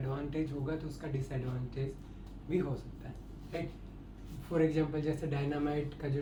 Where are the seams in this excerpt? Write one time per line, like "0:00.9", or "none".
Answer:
none